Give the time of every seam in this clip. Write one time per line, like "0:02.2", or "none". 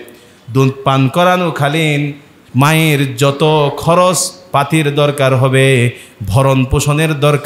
none

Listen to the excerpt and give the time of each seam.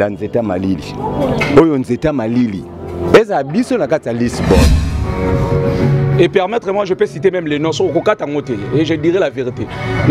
0:04.8

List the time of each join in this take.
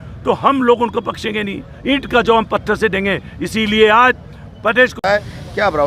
0:05.0

